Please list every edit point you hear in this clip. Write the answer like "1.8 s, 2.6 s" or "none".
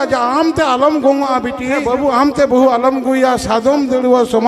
1.8 s